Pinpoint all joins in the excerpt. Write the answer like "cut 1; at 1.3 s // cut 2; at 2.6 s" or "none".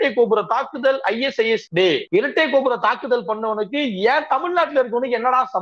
cut 1; at 1.8 s

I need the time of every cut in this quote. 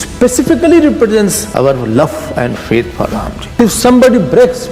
cut 1; at 1.4 s // cut 2; at 3.4 s

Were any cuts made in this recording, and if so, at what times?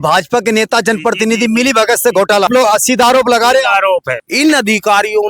cut 1; at 2.5 s // cut 2; at 4.2 s

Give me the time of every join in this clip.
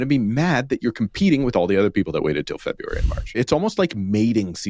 cut 1; at 3.4 s

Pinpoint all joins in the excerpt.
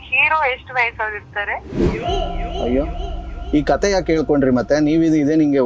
cut 1; at 1.8 s

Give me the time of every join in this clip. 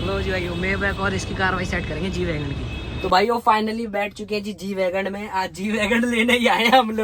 cut 1; at 2.8 s

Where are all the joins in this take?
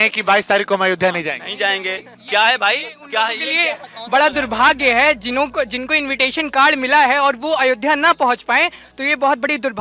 none

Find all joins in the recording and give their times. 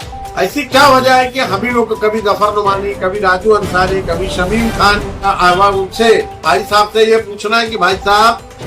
cut 1; at 5.2 s

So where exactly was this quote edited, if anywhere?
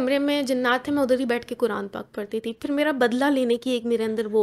none

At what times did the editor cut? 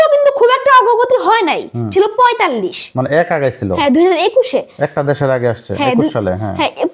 none

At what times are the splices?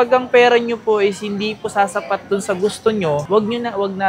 none

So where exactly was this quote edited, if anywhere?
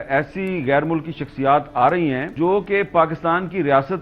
cut 1; at 2.3 s

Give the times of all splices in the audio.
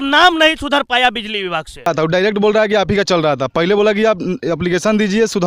cut 1; at 1.8 s

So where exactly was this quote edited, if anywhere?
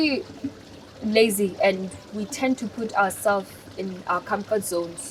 none

